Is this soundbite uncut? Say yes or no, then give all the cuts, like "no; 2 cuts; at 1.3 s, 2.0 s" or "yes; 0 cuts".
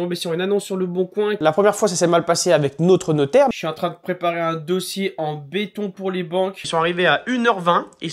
no; 3 cuts; at 1.4 s, 3.5 s, 6.6 s